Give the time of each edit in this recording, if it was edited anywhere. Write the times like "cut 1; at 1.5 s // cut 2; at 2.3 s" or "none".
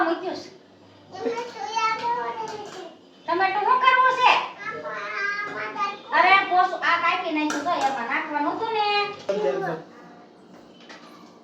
cut 1; at 9.2 s